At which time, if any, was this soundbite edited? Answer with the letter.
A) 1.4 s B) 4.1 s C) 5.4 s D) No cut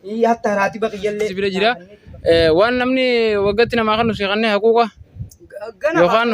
A